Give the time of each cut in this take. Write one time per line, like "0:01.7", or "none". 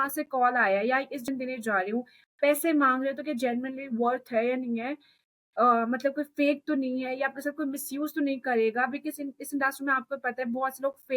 0:01.2